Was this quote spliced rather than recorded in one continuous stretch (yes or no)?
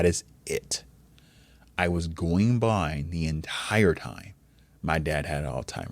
no